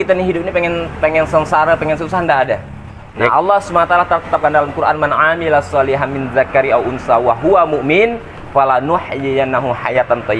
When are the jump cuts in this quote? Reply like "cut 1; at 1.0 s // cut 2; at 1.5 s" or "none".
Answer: cut 1; at 3.3 s